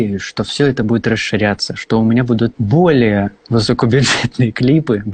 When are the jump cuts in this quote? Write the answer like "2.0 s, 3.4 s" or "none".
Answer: 2.6 s